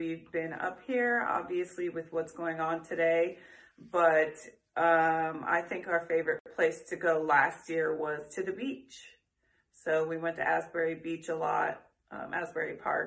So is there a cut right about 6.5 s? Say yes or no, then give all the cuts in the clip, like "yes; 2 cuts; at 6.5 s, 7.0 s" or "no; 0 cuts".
yes; 1 cut; at 6.5 s